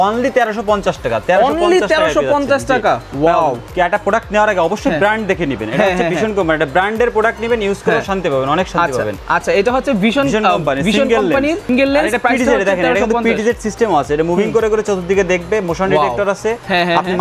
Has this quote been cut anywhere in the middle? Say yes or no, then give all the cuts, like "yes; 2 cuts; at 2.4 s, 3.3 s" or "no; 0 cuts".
no; 0 cuts